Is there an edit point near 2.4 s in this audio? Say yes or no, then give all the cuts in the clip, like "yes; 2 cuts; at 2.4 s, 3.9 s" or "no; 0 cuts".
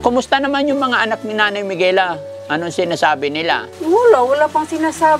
no; 1 cut; at 3.7 s